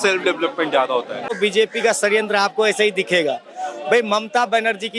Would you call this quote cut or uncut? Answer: cut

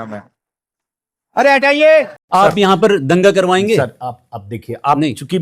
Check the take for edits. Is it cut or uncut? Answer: cut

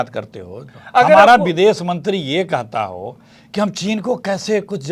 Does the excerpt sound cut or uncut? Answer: uncut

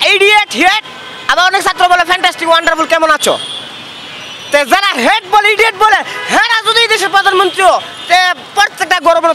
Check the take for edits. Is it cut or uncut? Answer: uncut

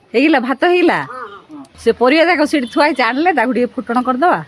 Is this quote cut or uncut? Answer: cut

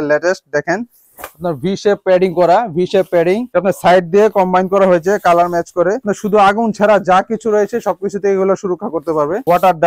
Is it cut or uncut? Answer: cut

